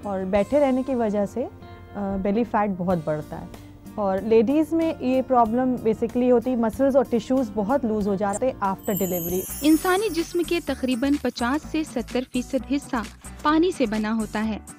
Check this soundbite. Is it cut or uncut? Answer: cut